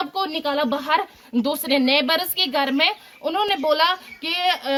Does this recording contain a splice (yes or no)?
no